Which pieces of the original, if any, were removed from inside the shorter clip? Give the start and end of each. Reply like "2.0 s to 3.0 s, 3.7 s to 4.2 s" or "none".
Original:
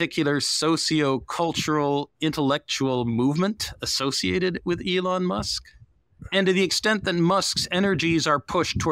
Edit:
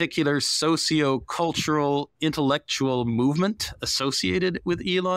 none